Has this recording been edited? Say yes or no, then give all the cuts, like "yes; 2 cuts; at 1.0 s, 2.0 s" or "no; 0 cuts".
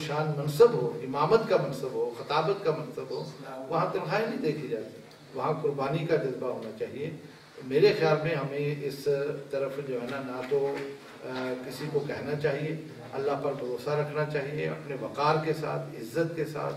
no; 0 cuts